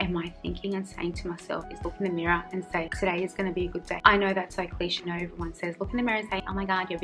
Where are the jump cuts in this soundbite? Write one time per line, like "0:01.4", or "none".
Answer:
0:01.7
0:05.0